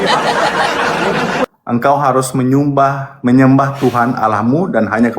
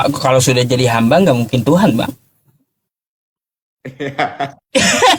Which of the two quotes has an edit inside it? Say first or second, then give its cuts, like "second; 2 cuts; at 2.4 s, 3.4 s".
first; 1 cut; at 1.5 s